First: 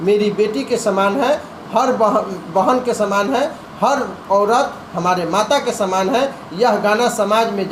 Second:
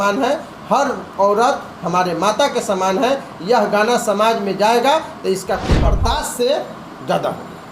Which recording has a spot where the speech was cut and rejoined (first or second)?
second